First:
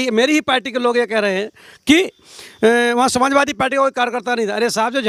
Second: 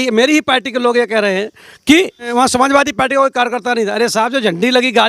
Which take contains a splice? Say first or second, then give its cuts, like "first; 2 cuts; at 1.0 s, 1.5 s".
second; 1 cut; at 2.3 s